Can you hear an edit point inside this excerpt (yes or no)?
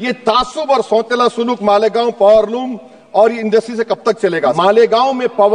yes